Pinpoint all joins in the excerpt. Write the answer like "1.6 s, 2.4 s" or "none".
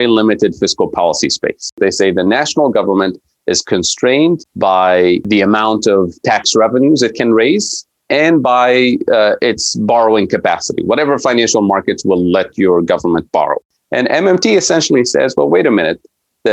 1.8 s, 4.5 s, 5.2 s, 13.6 s